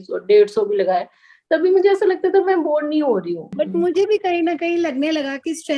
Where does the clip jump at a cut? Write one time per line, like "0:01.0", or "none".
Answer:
0:03.4